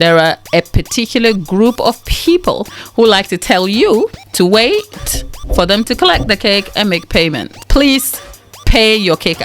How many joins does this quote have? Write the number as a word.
three